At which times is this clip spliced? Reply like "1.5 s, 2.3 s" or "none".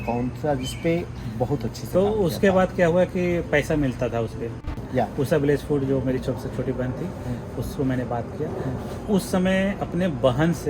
4.7 s